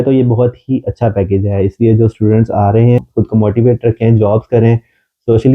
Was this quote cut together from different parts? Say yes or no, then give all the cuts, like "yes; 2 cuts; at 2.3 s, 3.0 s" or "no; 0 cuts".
yes; 1 cut; at 3.0 s